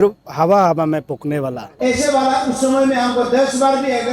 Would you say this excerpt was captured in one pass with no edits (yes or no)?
no